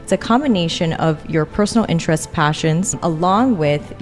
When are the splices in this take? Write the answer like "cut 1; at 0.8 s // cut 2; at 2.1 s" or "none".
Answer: cut 1; at 3.0 s